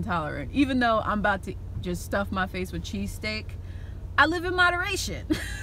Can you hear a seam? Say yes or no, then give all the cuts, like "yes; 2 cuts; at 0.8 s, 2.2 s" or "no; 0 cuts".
no; 0 cuts